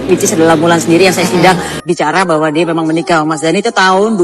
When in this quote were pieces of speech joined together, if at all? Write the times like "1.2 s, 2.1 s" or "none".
1.8 s